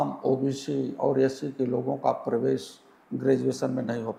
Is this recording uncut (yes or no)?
yes